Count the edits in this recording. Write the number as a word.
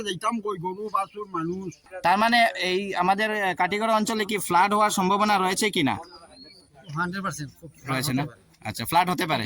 one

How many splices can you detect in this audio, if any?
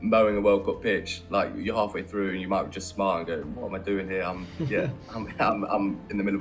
zero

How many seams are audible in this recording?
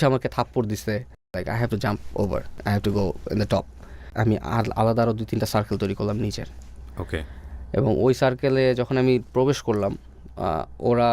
three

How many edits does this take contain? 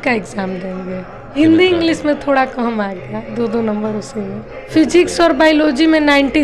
two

